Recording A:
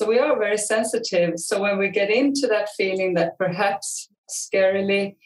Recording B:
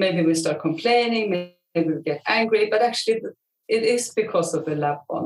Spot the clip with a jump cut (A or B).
A